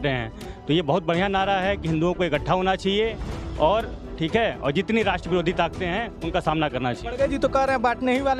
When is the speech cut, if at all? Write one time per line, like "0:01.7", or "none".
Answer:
none